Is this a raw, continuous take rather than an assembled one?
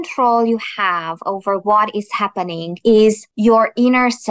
no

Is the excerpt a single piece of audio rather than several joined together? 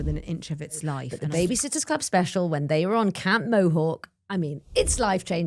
no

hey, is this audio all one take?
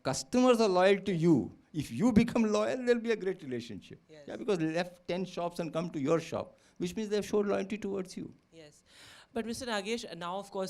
yes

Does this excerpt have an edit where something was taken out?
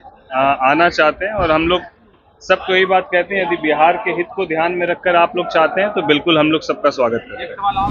no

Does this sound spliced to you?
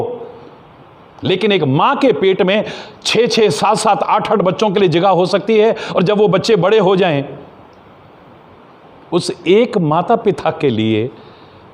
no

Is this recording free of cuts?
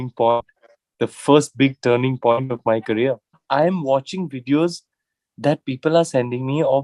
no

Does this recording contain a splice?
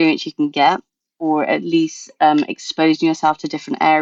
no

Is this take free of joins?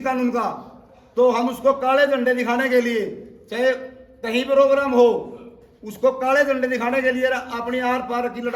yes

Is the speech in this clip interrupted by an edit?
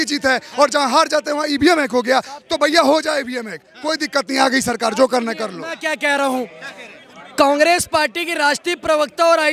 no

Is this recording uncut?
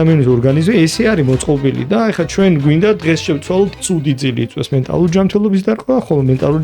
no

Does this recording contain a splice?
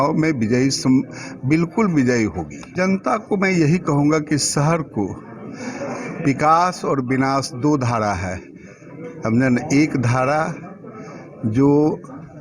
yes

